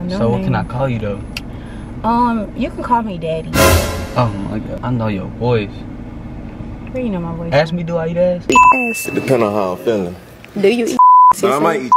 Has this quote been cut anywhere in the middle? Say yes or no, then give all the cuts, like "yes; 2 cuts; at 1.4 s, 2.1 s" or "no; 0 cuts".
yes; 1 cut; at 4.7 s